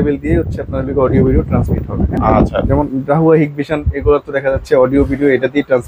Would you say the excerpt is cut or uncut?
uncut